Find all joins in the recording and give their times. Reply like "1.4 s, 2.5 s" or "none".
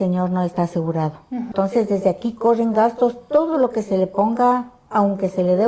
1.5 s

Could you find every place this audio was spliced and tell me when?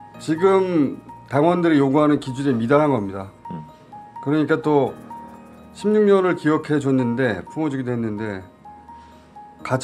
none

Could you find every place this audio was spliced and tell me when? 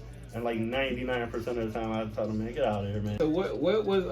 3.1 s

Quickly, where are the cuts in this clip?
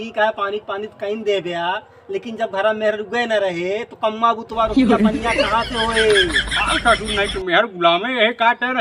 none

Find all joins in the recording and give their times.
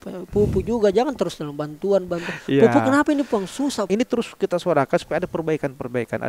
3.9 s

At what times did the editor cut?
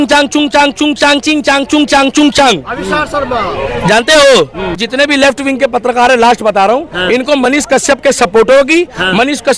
4.8 s

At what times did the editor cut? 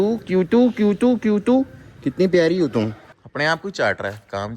3.1 s

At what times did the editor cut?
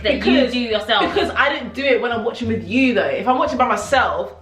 none

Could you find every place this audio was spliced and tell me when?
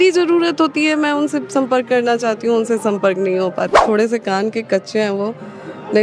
3.8 s

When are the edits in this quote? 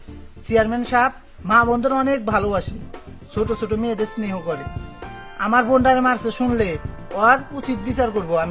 none

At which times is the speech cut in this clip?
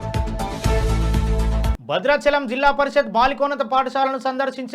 1.7 s

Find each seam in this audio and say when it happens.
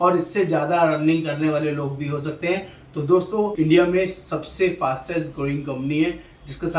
3.5 s

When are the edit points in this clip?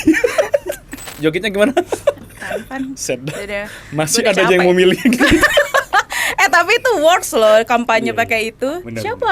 1.0 s

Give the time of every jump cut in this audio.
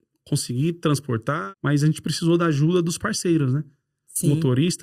1.4 s

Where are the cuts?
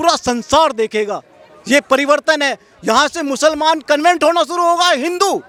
none

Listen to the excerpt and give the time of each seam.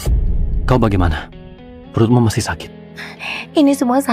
none

